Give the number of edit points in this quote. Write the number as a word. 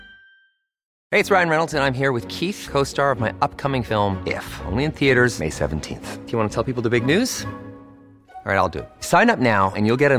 one